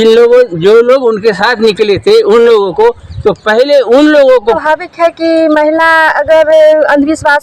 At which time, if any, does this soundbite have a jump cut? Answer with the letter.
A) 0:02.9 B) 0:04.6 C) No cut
B